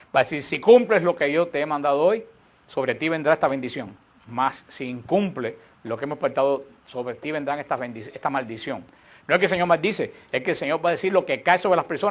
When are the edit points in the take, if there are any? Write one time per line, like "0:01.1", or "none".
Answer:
none